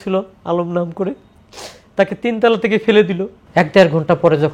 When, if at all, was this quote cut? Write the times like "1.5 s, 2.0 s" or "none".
3.3 s